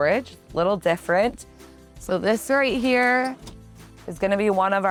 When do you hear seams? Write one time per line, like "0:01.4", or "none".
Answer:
none